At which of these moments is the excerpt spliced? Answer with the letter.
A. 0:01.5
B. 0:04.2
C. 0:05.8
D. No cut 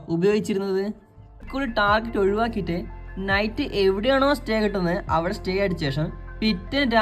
A